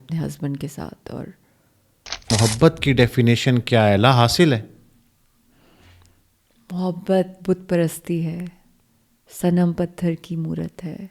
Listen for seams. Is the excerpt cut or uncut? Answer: cut